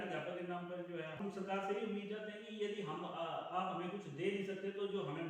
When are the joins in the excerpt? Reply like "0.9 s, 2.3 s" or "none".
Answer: 1.2 s